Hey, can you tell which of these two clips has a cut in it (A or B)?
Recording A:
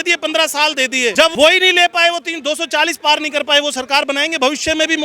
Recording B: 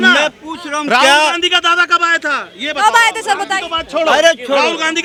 A